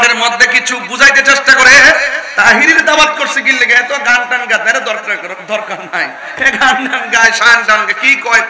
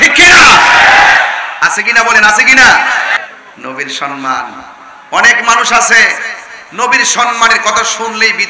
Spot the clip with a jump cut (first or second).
second